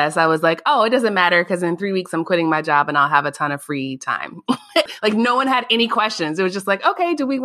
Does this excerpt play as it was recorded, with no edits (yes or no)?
no